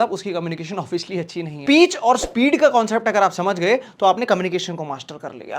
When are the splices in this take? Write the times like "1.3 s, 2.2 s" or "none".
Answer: 1.6 s